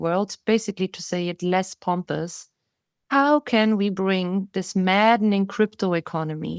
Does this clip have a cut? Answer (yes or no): no